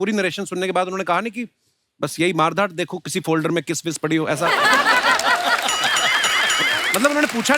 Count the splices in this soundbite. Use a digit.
0